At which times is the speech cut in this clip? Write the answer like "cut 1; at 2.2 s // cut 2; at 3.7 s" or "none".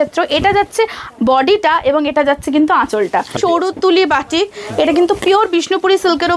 cut 1; at 3.4 s